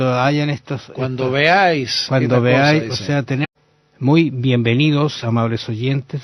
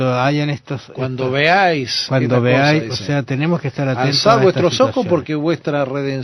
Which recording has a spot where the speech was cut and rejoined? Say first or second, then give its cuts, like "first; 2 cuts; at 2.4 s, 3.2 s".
second; 1 cut; at 3.4 s